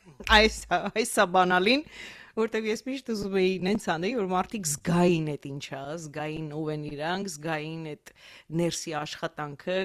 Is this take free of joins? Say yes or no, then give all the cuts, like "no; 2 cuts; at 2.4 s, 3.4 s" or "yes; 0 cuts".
yes; 0 cuts